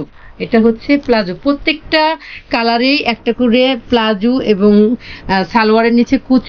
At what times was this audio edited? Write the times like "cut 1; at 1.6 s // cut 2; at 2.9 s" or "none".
none